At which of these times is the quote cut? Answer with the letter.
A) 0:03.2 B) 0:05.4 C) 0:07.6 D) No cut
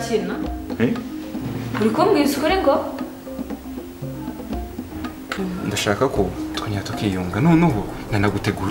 B